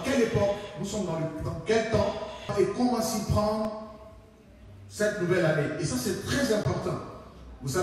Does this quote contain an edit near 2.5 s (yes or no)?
yes